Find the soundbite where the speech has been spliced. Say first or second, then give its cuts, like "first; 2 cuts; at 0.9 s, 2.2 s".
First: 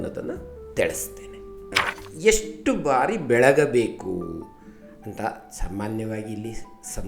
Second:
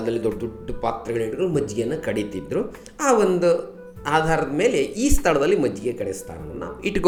first; 1 cut; at 1.7 s